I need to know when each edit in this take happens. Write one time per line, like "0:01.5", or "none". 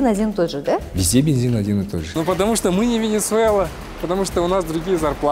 0:02.1